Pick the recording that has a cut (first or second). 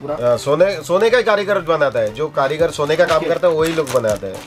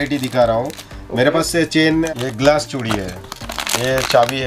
second